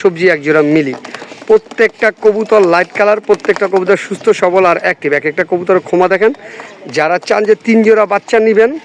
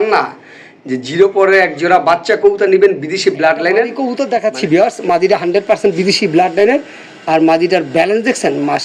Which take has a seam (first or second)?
second